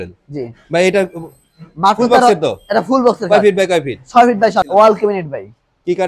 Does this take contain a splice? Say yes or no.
yes